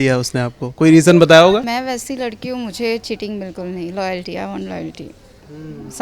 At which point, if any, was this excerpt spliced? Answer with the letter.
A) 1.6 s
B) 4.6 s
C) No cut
A